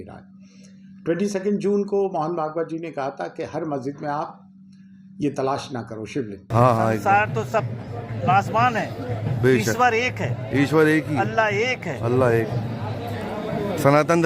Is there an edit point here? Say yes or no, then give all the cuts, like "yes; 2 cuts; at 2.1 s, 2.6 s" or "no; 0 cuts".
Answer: yes; 1 cut; at 6.4 s